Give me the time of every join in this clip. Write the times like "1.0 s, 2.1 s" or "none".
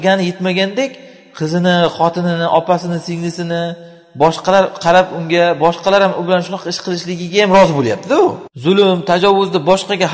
8.5 s